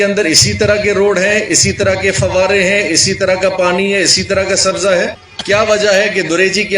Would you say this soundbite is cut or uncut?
cut